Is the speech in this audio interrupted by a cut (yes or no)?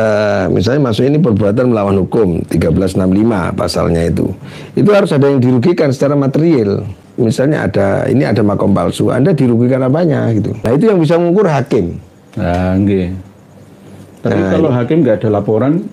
yes